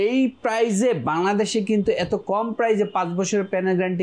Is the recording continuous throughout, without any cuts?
yes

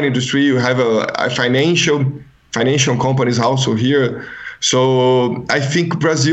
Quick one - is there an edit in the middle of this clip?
no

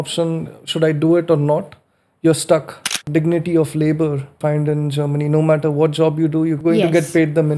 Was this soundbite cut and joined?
yes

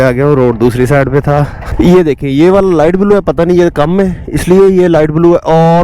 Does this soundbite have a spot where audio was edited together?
yes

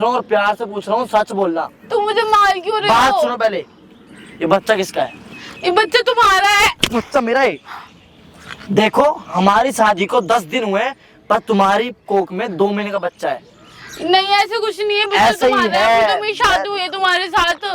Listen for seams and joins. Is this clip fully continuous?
yes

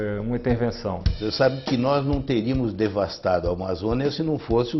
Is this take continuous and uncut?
no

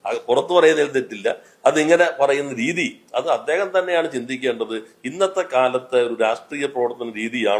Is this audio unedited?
yes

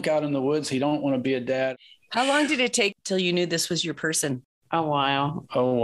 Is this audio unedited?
no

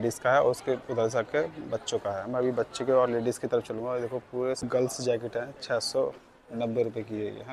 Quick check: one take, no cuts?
no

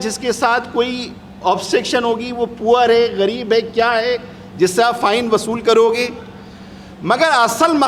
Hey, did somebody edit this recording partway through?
no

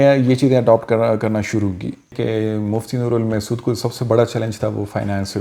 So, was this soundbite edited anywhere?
yes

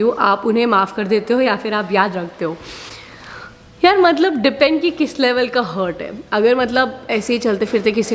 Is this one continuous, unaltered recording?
yes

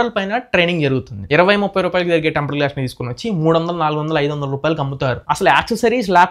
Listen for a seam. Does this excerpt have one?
yes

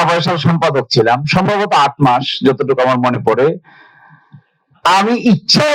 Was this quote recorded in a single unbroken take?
yes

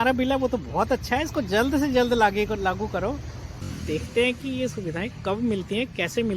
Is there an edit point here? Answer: yes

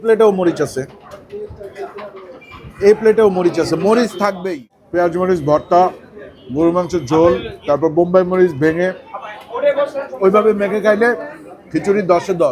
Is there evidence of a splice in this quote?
yes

